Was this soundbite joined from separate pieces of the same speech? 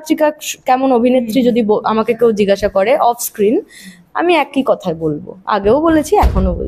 no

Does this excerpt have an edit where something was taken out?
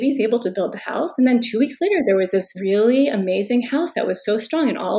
yes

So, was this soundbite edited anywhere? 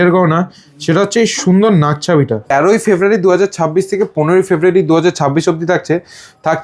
yes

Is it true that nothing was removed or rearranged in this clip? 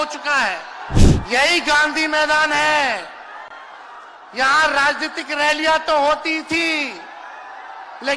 no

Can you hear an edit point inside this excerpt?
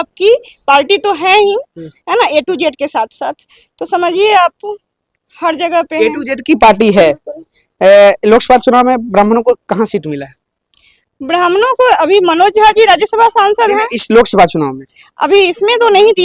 no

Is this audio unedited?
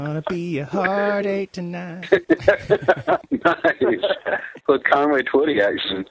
no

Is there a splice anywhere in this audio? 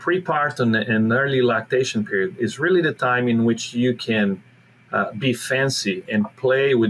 no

